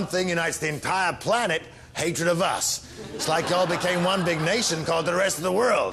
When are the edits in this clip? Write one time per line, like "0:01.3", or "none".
0:04.7